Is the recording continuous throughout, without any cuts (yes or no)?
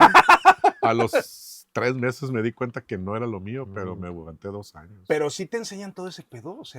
yes